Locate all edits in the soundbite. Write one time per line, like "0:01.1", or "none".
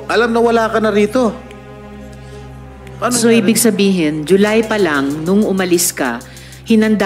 0:01.5
0:03.0